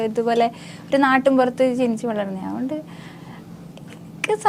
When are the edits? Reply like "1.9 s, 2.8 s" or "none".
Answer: none